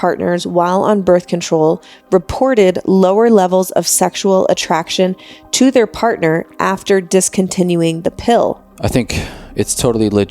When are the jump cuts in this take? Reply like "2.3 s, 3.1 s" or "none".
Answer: 8.7 s